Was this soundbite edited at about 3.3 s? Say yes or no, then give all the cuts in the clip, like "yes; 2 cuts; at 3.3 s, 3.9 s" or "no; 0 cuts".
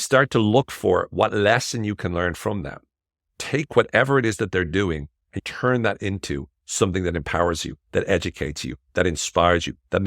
yes; 2 cuts; at 3.3 s, 5.4 s